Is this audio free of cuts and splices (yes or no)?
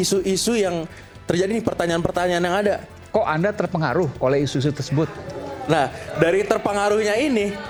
yes